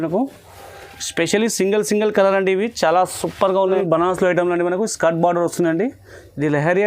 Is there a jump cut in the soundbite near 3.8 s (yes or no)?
yes